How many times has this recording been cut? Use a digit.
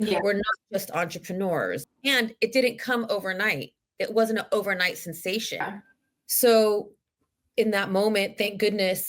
2